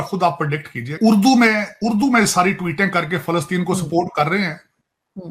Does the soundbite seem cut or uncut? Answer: cut